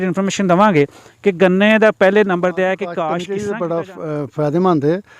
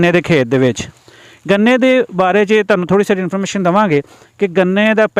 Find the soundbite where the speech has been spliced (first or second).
first